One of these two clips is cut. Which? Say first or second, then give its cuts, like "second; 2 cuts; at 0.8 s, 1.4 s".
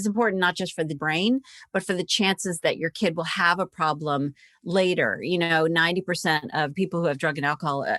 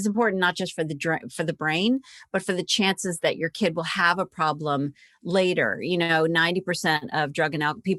first; 2 cuts; at 1.0 s, 6.7 s